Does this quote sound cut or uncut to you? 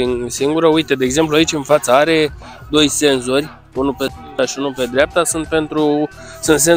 uncut